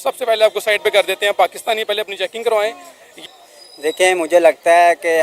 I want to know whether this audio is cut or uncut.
cut